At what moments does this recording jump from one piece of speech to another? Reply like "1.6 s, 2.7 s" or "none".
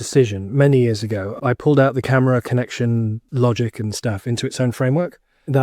1.3 s, 3.2 s